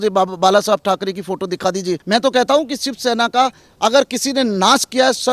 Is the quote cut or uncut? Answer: cut